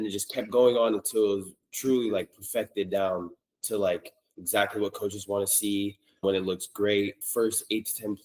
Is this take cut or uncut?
cut